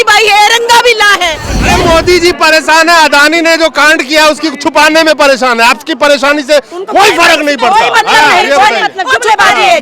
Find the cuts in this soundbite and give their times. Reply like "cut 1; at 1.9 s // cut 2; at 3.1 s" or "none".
cut 1; at 1.5 s